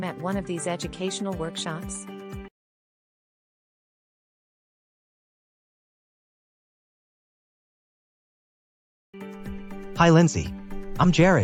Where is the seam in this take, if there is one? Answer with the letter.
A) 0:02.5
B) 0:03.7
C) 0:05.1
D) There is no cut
D